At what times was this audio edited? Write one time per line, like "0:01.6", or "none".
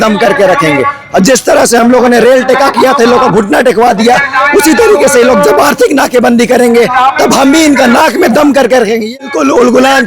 0:09.1